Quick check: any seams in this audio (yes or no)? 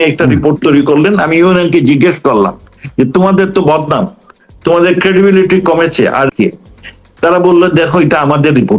yes